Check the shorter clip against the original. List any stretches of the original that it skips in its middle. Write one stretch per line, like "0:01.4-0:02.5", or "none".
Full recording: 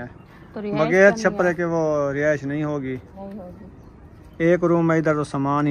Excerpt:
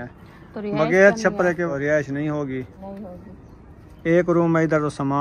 0:01.7-0:02.0